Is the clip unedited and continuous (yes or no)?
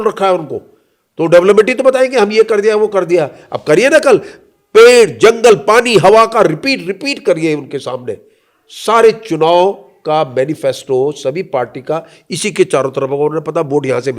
yes